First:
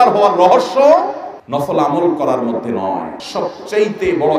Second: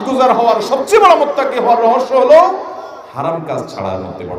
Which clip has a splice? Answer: first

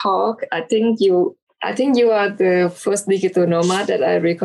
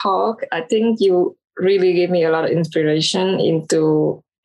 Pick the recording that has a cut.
first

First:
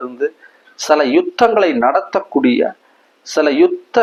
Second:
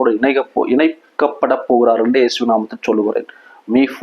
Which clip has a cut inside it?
second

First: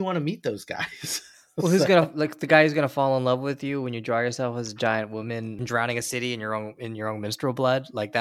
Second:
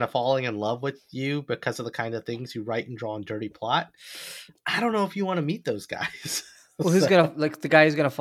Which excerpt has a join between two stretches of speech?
first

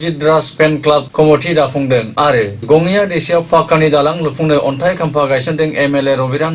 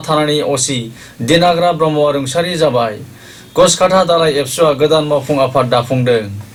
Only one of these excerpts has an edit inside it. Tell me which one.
first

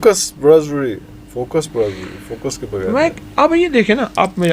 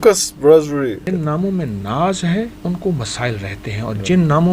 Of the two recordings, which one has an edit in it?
second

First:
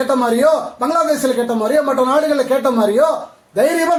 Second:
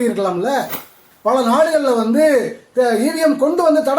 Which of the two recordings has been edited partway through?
second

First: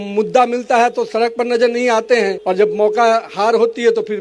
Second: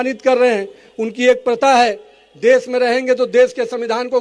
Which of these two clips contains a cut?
first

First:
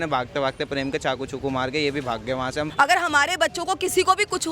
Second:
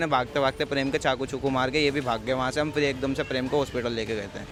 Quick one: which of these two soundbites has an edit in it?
first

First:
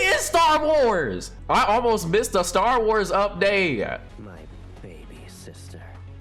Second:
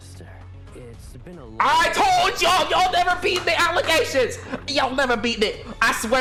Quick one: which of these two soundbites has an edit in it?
first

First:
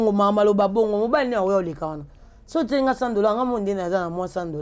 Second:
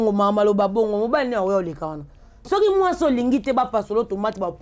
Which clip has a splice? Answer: second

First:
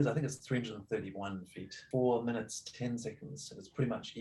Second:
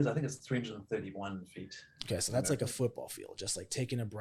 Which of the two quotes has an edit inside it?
first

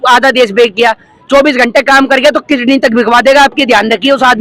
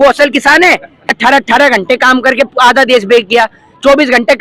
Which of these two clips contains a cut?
second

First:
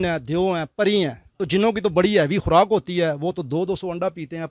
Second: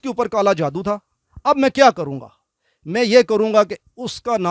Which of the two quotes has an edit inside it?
first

